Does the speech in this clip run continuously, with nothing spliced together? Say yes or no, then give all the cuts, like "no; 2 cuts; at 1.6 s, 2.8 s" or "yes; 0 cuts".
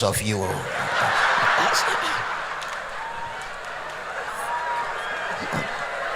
yes; 0 cuts